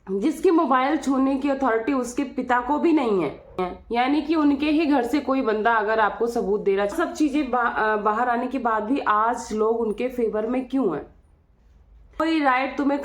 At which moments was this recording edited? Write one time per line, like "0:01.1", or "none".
0:03.6
0:06.9
0:12.2